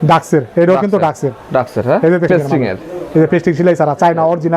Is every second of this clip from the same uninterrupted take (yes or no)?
no